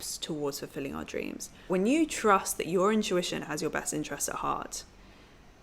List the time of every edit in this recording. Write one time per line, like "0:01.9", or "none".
0:01.7